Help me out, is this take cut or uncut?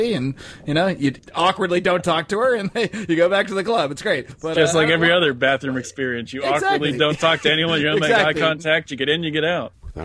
cut